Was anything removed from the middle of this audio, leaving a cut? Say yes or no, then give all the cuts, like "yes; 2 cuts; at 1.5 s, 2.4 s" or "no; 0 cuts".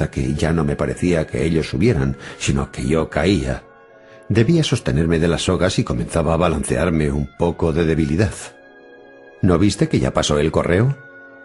no; 0 cuts